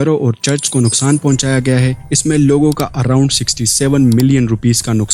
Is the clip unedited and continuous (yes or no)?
yes